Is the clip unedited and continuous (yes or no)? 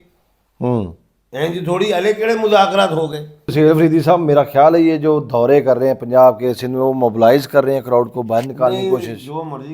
no